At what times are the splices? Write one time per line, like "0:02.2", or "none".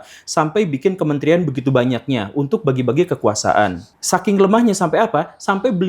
0:03.9